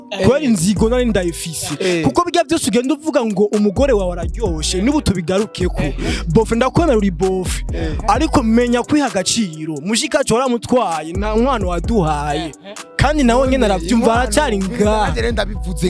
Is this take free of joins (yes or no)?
yes